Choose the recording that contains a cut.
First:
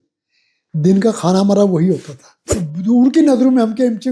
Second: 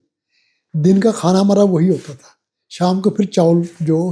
first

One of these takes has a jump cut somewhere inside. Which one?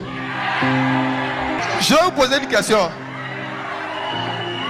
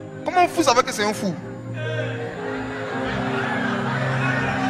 first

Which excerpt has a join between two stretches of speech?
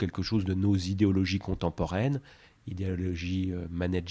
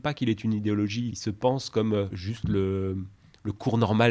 second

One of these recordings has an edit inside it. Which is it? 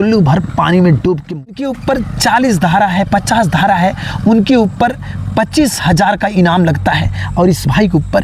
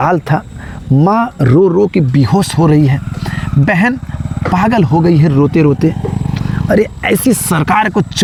first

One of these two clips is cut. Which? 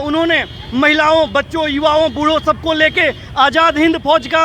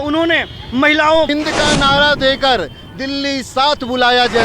second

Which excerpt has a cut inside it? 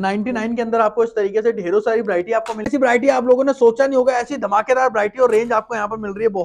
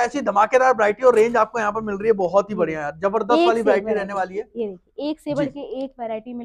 first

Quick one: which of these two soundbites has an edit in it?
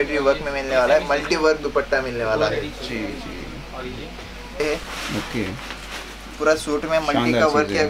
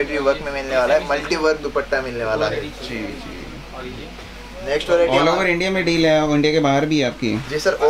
first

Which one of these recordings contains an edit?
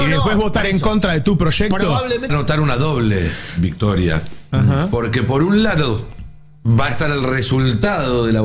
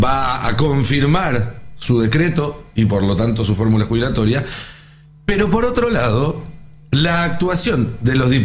first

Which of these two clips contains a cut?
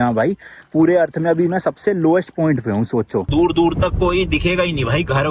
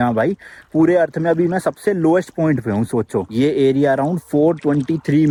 first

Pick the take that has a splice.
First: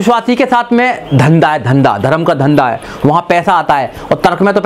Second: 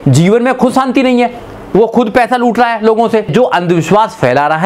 second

